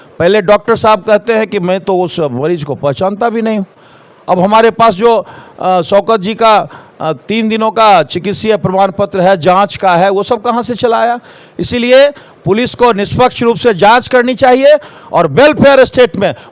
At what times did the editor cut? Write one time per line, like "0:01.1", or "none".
none

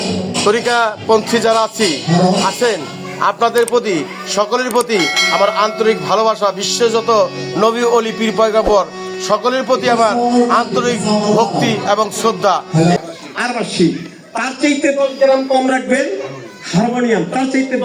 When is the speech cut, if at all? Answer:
0:13.0

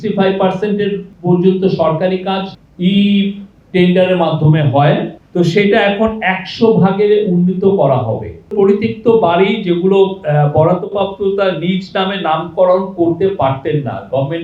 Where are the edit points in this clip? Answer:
0:01.1
0:02.5
0:05.2
0:08.5

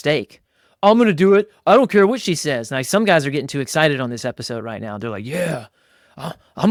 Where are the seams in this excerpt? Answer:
none

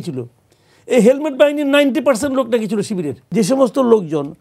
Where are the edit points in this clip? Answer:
0:03.2

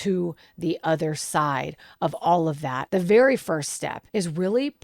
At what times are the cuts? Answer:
0:02.8
0:03.9

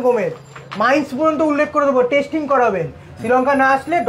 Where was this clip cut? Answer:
none

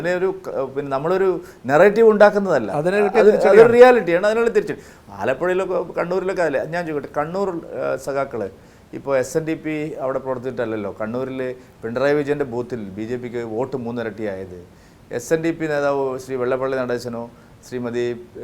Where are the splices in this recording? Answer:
none

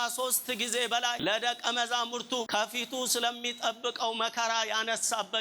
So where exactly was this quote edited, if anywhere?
0:01.2
0:02.5

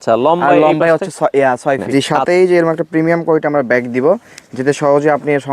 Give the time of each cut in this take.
0:01.9

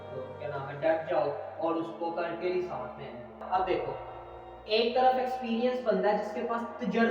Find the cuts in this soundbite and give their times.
0:03.4

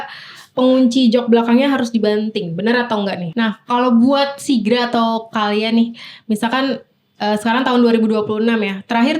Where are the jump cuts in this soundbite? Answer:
0:03.2

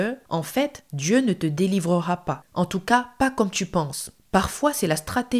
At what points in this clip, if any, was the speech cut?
0:04.2

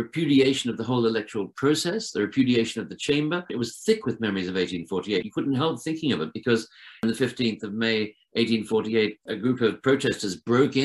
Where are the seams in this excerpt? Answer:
0:03.5
0:05.3
0:07.0
0:09.2

